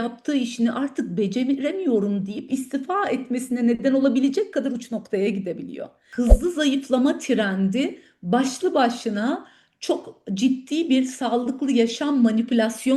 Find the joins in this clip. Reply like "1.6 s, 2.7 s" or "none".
6.1 s

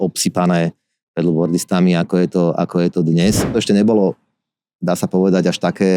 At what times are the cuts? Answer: 3.5 s

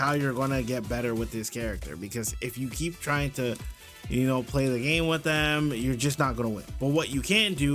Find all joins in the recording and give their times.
6.7 s

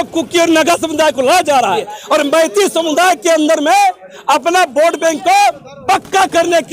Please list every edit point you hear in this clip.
1.9 s

